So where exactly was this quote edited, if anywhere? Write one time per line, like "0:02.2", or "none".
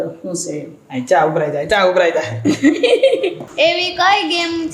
0:03.4